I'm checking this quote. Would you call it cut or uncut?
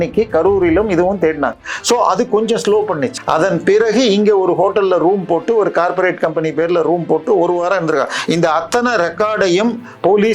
cut